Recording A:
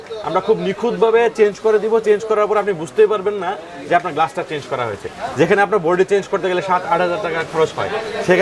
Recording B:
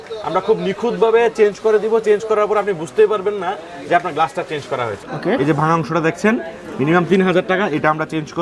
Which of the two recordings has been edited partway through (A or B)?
B